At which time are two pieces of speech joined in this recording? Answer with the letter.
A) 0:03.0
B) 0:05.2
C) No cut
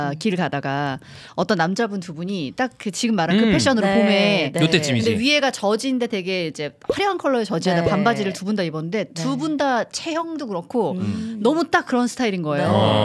C